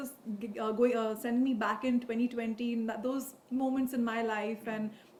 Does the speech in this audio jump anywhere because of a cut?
no; 0 cuts

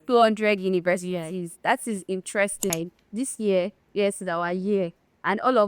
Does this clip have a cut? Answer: yes; 1 cut; at 2.7 s

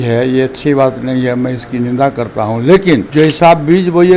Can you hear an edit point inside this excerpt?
yes; 1 cut; at 3.1 s

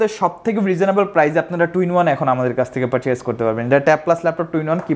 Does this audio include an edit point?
no; 0 cuts

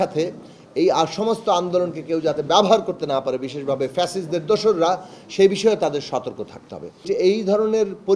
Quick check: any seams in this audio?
yes; 1 cut; at 7.0 s

